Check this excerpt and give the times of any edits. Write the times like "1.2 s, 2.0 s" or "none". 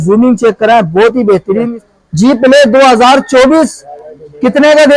1.8 s